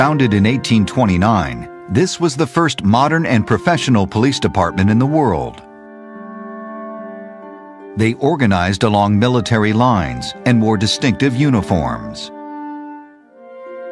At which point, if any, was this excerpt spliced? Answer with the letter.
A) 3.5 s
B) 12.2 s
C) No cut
B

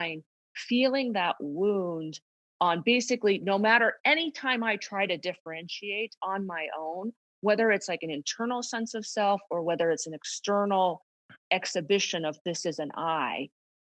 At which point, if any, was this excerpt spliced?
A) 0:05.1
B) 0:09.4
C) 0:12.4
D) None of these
D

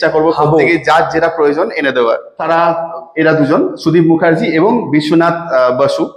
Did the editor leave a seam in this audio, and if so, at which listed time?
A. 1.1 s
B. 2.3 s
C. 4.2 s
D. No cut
B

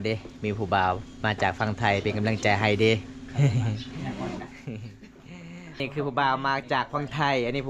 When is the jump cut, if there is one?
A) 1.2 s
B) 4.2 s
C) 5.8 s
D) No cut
C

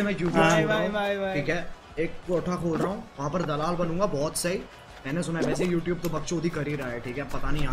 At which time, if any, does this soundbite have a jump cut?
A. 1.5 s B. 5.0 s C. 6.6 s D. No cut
D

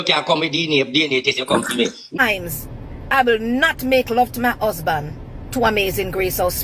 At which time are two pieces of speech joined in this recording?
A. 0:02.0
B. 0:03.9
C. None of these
A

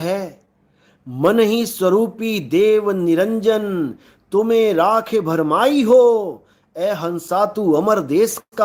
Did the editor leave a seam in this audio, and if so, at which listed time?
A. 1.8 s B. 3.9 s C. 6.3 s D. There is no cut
D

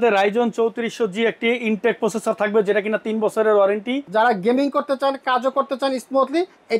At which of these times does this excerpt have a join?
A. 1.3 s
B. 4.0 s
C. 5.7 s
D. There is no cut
B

